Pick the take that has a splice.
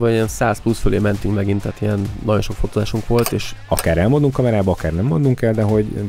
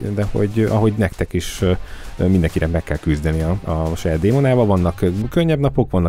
first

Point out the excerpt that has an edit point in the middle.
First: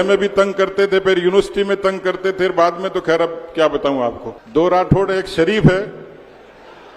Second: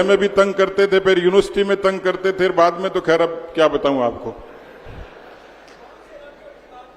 first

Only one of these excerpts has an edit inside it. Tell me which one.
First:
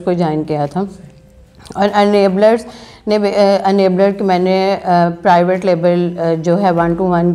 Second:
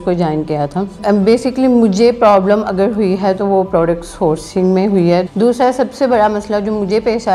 second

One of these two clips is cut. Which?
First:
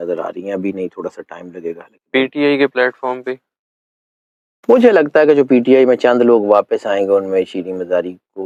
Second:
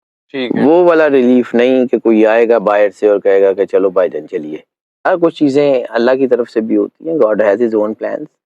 second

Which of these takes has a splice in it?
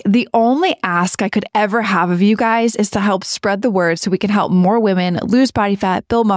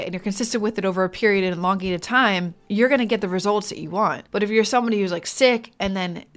second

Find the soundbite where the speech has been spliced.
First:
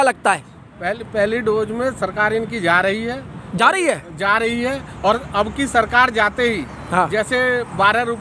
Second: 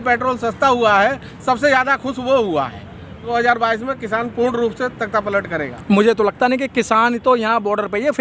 second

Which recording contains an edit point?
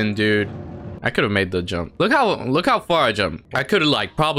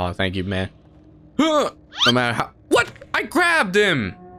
first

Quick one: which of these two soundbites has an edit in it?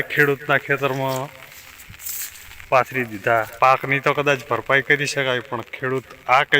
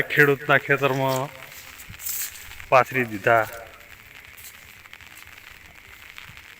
first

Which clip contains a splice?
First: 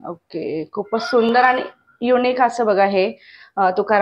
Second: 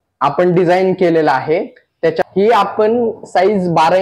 second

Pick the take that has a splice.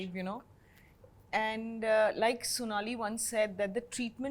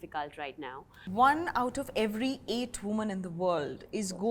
second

